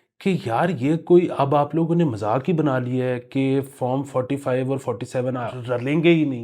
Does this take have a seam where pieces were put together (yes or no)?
yes